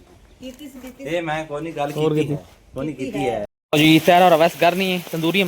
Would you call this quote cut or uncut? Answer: cut